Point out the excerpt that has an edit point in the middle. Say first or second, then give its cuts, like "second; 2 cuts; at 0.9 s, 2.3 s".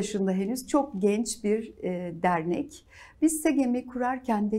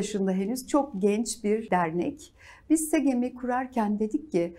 second; 1 cut; at 1.6 s